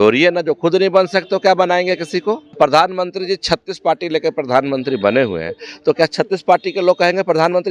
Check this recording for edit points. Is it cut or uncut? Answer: cut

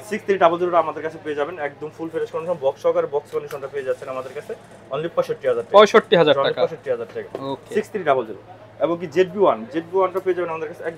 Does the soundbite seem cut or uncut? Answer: uncut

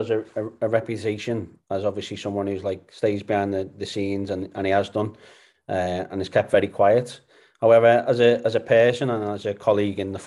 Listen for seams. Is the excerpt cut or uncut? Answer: uncut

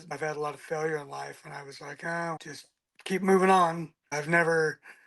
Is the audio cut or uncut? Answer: cut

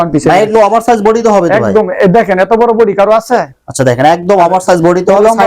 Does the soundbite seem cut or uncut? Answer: uncut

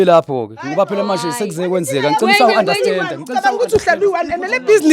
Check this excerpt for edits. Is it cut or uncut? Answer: uncut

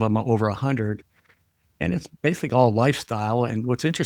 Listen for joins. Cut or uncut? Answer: uncut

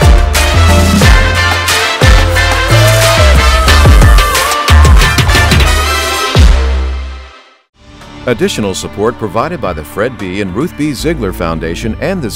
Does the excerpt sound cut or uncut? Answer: cut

